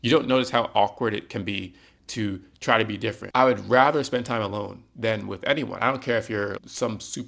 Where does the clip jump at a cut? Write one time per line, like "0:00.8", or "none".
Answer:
0:03.2